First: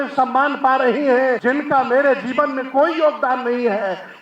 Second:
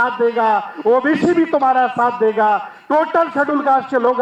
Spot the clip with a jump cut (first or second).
first